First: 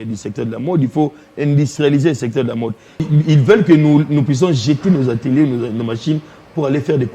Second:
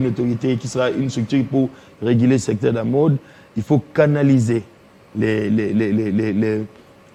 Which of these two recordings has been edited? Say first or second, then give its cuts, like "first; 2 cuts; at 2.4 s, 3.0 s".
first; 1 cut; at 3.1 s